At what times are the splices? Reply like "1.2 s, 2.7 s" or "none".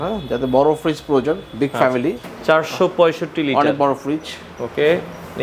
2.3 s